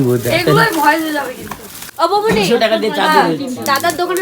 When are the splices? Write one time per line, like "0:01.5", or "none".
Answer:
0:01.9